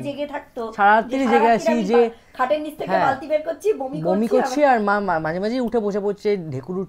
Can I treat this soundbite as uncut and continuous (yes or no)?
yes